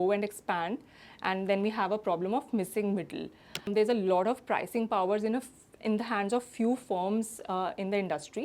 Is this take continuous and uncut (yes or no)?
no